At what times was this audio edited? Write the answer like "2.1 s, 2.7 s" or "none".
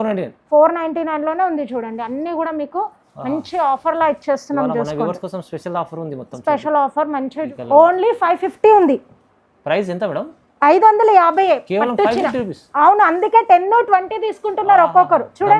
7.5 s